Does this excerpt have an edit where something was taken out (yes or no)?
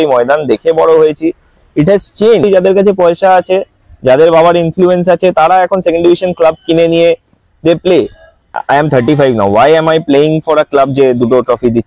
yes